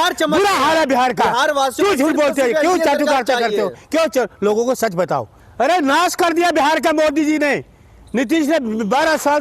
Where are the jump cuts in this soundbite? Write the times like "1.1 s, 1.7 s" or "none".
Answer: 5.4 s